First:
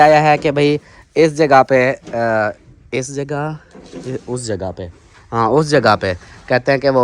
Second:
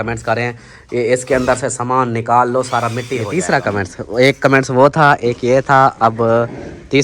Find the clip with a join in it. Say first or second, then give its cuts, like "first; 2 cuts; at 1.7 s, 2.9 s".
second; 1 cut; at 3.3 s